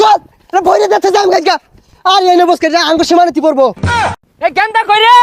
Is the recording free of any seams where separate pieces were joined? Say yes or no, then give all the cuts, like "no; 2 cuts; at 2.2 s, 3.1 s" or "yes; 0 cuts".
no; 1 cut; at 4.1 s